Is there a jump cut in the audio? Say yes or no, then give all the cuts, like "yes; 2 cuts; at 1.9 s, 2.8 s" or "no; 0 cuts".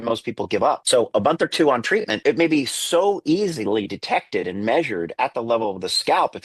yes; 2 cuts; at 0.8 s, 2.2 s